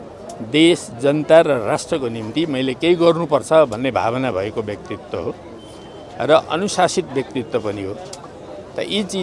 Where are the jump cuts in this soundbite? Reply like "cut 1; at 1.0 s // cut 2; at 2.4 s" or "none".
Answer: none